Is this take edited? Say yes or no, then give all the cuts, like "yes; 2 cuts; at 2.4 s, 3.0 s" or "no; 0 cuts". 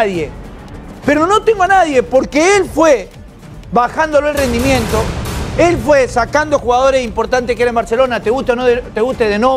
no; 0 cuts